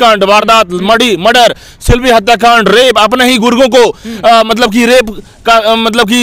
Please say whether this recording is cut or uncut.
uncut